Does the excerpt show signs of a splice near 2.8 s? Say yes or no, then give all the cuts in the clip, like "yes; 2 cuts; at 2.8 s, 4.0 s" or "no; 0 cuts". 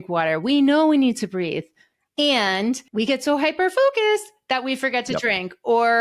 yes; 1 cut; at 2.8 s